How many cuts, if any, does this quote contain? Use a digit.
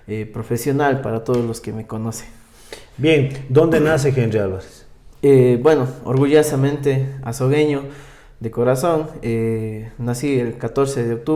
0